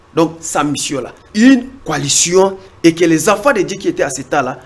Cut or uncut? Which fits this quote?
cut